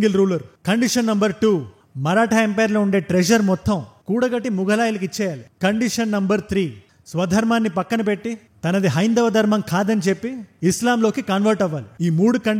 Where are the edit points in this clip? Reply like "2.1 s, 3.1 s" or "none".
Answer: none